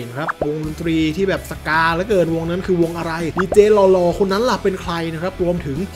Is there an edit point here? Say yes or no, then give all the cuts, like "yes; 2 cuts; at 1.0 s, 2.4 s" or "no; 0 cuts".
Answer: no; 0 cuts